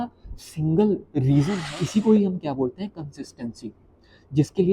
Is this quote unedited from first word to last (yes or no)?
no